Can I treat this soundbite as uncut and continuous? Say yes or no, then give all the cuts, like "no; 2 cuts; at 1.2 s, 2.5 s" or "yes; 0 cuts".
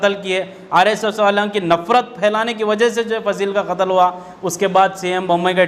yes; 0 cuts